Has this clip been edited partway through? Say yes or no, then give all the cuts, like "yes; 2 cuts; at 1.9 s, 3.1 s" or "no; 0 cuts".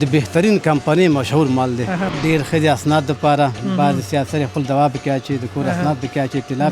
yes; 1 cut; at 2.1 s